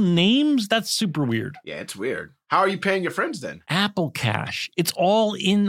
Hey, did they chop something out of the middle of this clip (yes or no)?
no